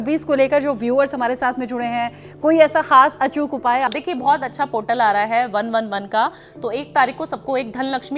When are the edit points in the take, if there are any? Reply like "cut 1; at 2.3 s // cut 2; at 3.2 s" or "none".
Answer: cut 1; at 3.9 s